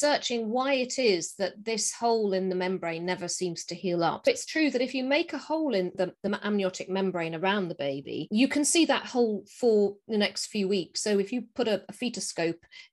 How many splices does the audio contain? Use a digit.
2